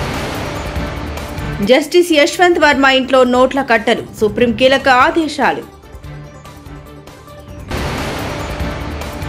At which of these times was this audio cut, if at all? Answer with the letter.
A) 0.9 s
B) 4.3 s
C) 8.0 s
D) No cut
A